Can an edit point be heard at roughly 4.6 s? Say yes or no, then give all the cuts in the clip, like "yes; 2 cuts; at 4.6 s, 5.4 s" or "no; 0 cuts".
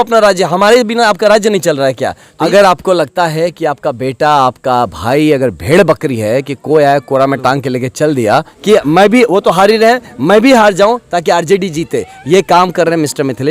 no; 2 cuts; at 2.4 s, 8.5 s